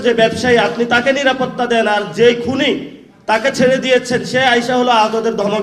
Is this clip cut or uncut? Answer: uncut